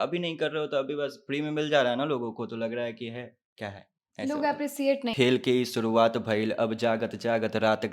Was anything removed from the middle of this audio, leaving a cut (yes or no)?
yes